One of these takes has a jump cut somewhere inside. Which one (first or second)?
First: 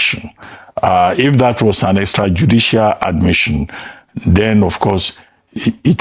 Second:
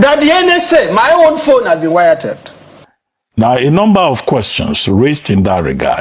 second